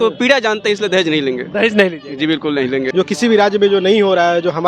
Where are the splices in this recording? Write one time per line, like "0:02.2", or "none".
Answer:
0:02.9